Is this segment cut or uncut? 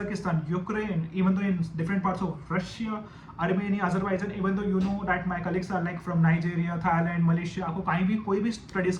uncut